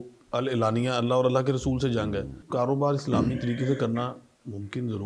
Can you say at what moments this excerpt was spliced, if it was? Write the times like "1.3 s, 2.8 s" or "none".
2.4 s